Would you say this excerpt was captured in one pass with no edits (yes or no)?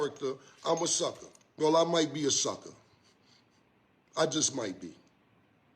yes